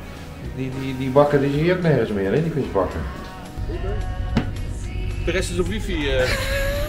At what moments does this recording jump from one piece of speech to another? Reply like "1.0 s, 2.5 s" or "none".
3.5 s